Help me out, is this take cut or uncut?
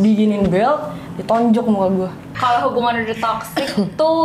cut